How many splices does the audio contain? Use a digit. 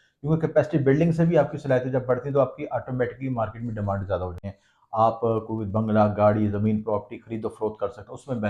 1